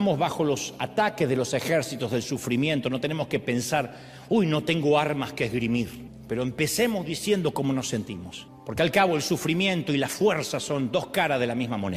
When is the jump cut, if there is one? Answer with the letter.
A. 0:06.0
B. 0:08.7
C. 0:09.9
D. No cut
A